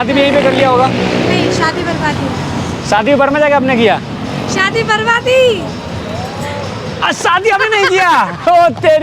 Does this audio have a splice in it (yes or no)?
no